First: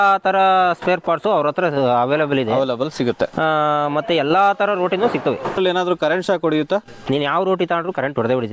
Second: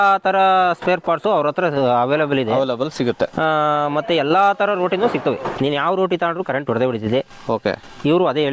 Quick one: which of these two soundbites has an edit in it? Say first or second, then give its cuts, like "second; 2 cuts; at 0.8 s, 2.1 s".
second; 1 cut; at 5.4 s